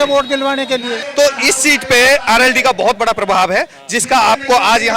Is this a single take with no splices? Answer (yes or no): no